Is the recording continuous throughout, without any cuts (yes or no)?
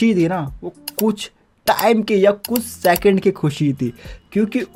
yes